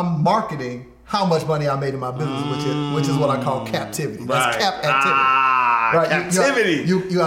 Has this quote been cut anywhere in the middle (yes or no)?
no